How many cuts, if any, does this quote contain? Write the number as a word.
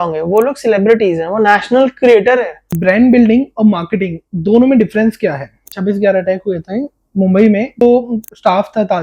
three